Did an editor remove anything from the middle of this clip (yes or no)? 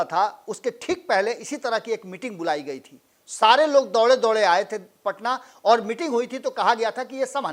no